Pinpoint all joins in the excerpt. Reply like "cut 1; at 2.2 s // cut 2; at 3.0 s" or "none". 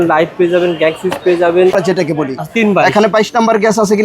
cut 1; at 1.7 s